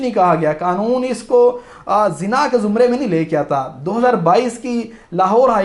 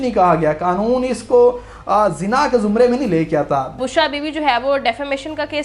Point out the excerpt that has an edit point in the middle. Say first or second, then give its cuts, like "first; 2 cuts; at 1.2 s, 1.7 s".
second; 1 cut; at 3.8 s